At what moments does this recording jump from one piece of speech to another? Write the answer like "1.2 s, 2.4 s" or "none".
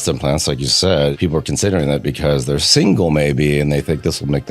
1.1 s

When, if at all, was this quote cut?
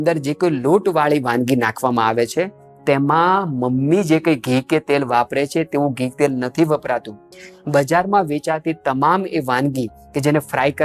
none

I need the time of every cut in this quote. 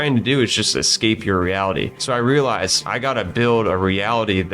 2.0 s, 2.8 s

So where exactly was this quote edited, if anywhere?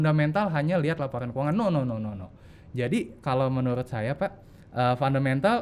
none

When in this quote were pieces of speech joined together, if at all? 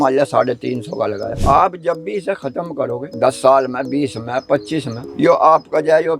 1.3 s, 3.1 s

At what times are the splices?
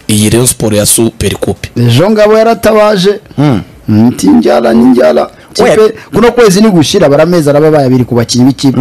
1.6 s

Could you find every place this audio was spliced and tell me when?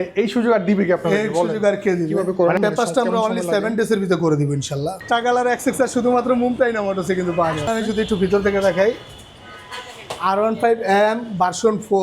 2.3 s, 5.0 s, 7.7 s

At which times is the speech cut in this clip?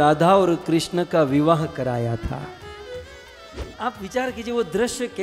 3.7 s

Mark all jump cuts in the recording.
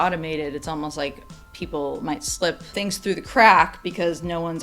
2.7 s

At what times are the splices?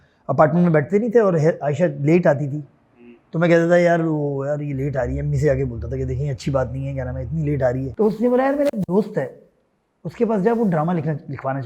7.9 s

